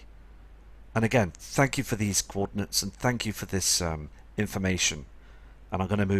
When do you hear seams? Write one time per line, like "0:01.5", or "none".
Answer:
0:01.2